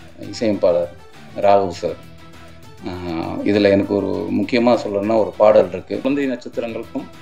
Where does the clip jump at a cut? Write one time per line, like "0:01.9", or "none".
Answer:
0:06.1